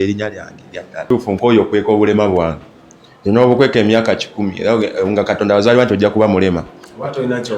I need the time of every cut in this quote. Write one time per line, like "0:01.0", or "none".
0:01.0